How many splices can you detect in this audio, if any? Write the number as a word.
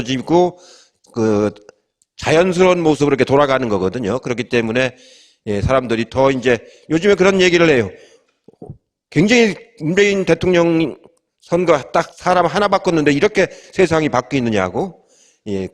one